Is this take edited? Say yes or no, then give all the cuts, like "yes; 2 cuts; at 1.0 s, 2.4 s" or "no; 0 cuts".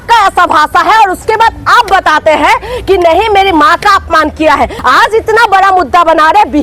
yes; 1 cut; at 4.8 s